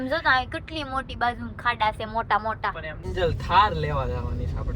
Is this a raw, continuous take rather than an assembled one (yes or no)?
no